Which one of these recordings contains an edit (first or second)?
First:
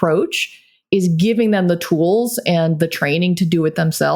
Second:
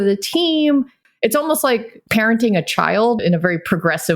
second